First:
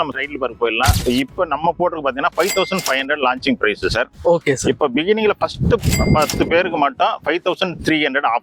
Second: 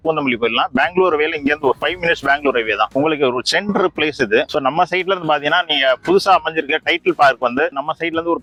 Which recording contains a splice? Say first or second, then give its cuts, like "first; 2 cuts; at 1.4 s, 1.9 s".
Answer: first; 1 cut; at 1.0 s